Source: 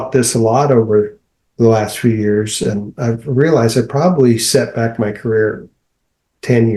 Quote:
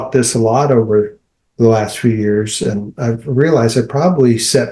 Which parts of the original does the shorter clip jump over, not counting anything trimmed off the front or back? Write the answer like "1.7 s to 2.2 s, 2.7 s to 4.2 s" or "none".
none

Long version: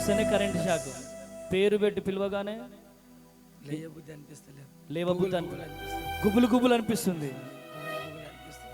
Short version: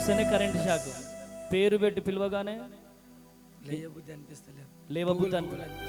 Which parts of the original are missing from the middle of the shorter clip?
none

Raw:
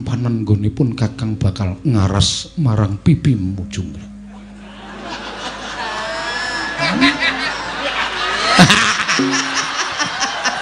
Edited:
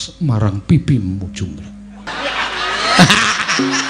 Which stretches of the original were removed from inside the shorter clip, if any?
4.4 s to 7.6 s

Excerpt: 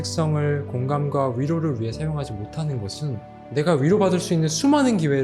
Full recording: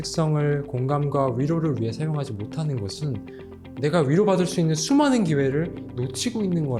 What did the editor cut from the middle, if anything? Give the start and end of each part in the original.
3.3 s to 3.6 s

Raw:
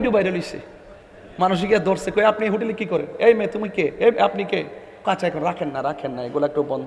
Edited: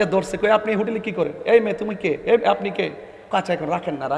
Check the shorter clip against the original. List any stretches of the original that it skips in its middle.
none

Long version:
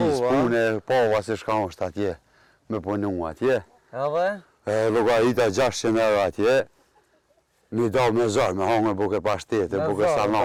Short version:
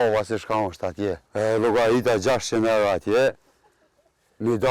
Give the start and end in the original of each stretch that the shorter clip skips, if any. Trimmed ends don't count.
2.2 s to 4.6 s

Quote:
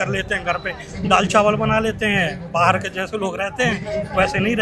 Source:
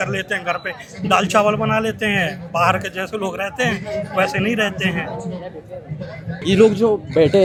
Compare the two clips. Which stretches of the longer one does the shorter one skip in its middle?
none

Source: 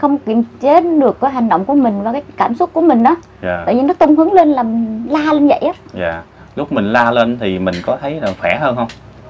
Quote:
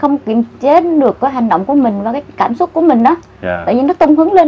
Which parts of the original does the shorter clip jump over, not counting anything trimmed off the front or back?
none

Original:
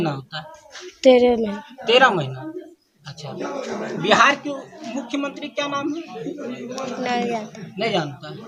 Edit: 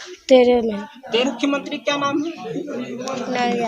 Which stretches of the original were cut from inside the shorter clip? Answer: 1.9 s to 4.9 s

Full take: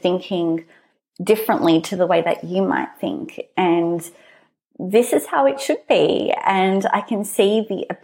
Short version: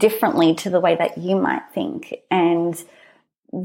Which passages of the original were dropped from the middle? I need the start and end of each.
none

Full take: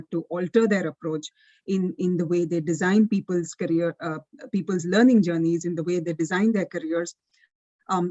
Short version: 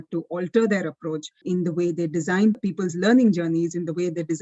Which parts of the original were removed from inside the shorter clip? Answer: 1.4 s to 1.9 s, 3.1 s to 4.5 s

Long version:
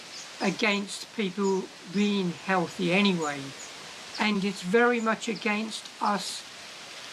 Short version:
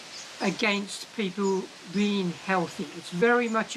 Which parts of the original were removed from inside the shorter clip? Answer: 2.9 s to 4.4 s

